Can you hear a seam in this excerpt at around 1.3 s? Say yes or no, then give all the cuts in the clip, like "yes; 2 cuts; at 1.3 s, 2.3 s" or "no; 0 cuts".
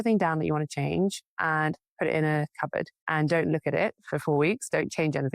no; 1 cut; at 3.0 s